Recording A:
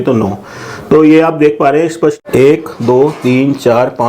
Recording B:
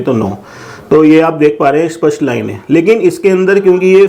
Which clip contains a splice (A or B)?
A